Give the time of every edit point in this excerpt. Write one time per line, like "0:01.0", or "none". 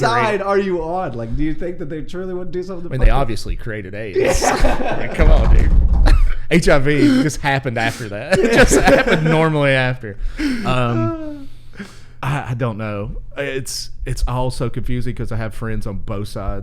none